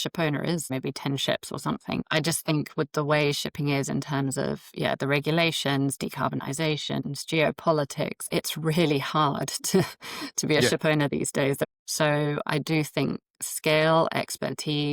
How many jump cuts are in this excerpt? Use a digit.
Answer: 4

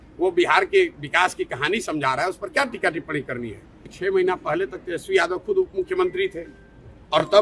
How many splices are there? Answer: 1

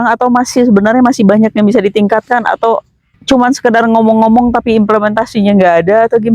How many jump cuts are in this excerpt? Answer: 1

